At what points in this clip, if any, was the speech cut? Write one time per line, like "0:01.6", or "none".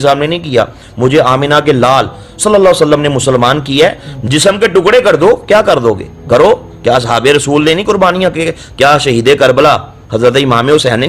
none